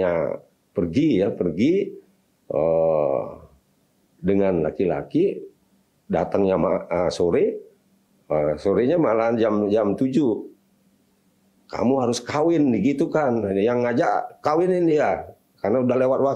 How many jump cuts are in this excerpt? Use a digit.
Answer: 0